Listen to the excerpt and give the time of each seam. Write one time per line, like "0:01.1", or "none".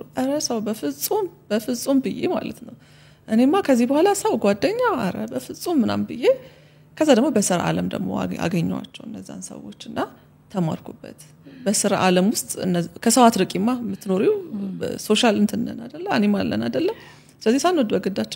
none